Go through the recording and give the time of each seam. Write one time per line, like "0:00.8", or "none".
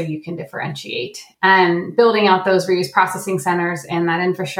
0:01.7